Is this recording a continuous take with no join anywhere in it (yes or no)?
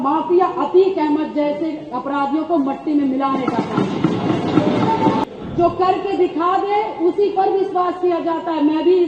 no